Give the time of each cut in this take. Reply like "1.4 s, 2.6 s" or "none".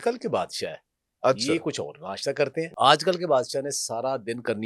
2.6 s